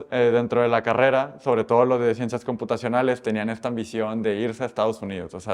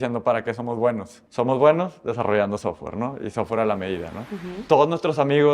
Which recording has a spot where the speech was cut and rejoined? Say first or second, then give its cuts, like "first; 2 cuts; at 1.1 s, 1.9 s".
second; 2 cuts; at 1.2 s, 4.5 s